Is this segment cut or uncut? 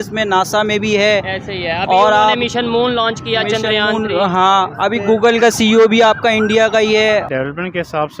cut